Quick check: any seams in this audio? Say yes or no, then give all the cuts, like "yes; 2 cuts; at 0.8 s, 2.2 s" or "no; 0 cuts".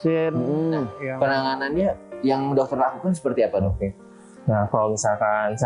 yes; 1 cut; at 1.0 s